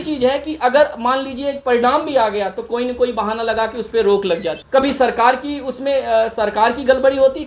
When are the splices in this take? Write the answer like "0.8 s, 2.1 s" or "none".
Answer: 4.6 s